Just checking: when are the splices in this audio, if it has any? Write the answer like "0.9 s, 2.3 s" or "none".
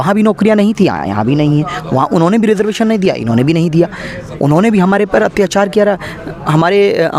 none